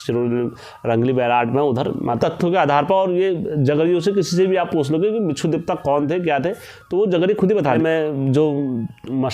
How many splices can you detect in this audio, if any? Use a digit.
1